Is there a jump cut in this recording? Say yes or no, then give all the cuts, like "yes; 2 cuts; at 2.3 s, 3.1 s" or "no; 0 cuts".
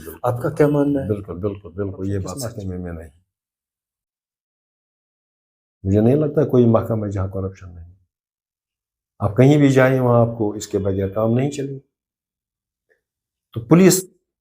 yes; 1 cut; at 2.6 s